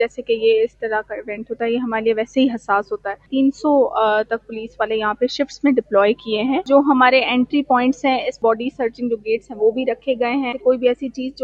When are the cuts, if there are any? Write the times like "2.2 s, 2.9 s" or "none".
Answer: 3.3 s, 6.7 s, 8.4 s, 10.6 s